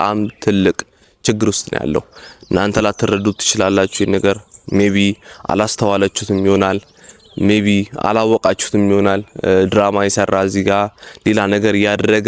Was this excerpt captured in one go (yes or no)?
yes